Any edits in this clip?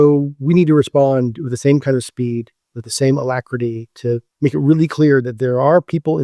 yes; 1 cut; at 4.3 s

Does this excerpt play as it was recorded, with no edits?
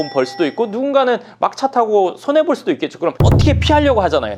no; 1 cut; at 3.2 s

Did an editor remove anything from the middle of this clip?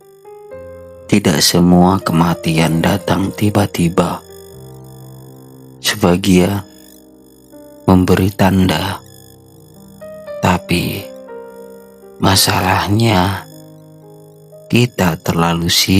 yes; 1 cut; at 1.0 s

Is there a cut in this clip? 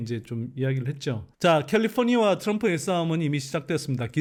no; 0 cuts

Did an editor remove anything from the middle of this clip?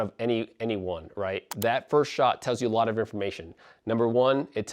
yes; 1 cut; at 1.5 s

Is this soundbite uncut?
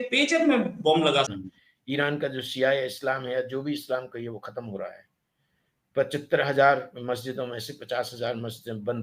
no; 1 cut; at 1.3 s

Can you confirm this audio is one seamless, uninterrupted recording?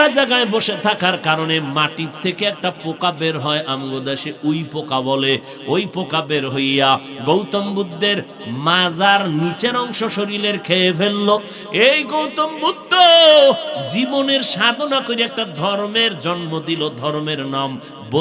yes; 0 cuts

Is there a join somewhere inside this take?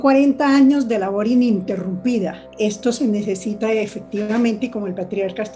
yes; 1 cut; at 2.4 s

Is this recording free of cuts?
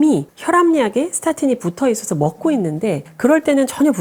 yes; 0 cuts

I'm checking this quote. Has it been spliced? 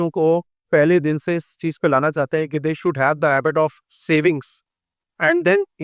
yes; 1 cut; at 3.9 s

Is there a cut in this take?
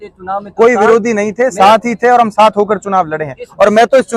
no; 0 cuts

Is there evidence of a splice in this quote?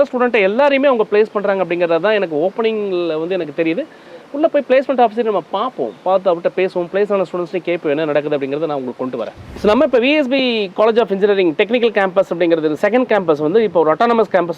no; 0 cuts

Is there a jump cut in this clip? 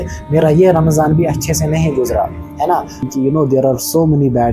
yes; 1 cut; at 3.0 s

